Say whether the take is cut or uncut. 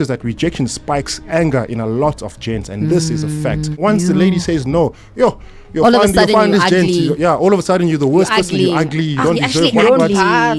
cut